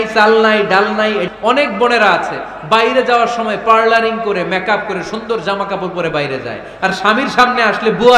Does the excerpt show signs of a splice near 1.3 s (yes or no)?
yes